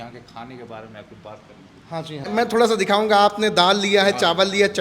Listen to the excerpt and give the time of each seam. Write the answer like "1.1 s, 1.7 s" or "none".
2.3 s